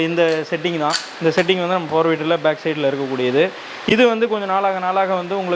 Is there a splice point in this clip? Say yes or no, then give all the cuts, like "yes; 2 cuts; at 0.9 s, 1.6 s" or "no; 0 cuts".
no; 0 cuts